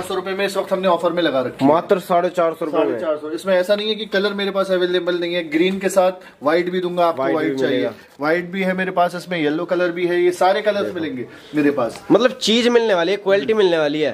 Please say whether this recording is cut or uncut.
uncut